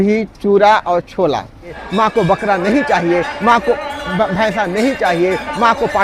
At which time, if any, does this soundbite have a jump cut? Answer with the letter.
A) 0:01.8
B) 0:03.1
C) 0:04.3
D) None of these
A